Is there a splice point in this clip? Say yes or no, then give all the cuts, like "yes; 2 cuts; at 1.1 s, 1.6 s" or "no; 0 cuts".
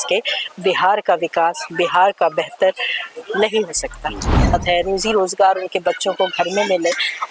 yes; 1 cut; at 4.5 s